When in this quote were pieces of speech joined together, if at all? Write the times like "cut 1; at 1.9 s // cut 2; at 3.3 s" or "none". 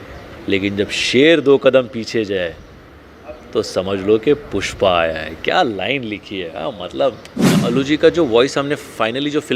cut 1; at 7.5 s